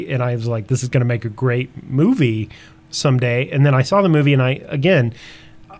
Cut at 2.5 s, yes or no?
no